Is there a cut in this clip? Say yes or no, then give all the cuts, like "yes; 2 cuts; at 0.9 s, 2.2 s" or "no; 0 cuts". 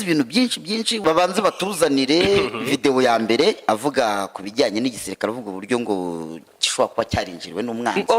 yes; 1 cut; at 1.0 s